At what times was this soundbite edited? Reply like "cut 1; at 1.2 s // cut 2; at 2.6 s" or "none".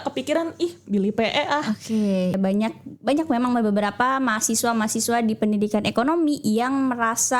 cut 1; at 2.3 s